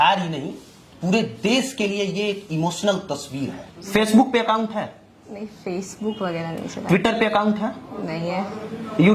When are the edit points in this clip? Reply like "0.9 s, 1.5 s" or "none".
3.8 s